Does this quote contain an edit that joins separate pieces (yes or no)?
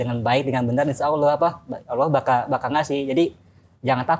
no